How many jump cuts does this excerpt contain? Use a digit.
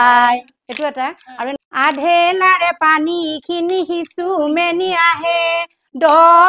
1